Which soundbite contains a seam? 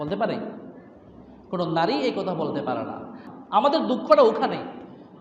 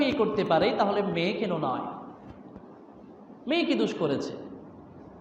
first; 1 cut; at 3.2 s

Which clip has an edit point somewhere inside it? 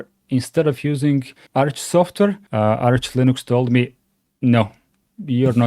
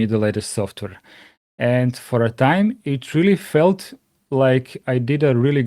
first; 2 cuts; at 1.4 s, 2.4 s

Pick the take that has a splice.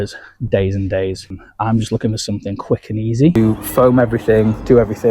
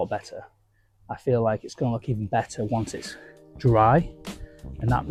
first; 2 cuts; at 1.4 s, 3.4 s

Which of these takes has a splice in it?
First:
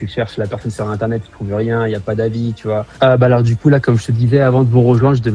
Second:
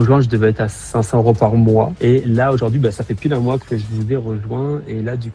first; 1 cut; at 2.9 s

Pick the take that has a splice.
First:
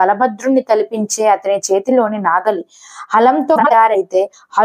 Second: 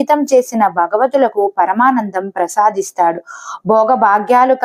first; 1 cut; at 3.6 s

